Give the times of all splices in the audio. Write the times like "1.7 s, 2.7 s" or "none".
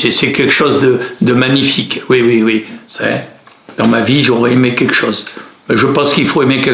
2.8 s